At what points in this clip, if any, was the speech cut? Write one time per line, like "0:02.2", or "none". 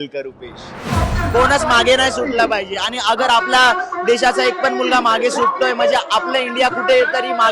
0:00.9